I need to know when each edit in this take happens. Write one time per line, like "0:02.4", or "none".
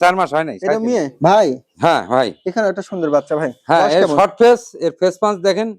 0:01.1